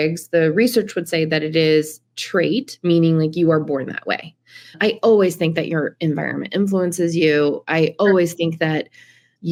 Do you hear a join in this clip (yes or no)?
no